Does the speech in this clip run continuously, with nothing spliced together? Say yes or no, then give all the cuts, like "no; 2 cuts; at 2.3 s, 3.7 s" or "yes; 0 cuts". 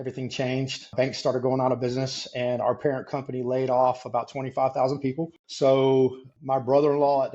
no; 3 cuts; at 0.9 s, 5.4 s, 6.3 s